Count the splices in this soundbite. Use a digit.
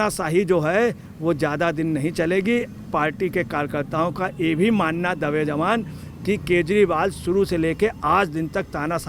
0